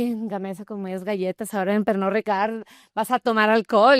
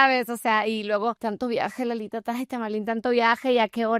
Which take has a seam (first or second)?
second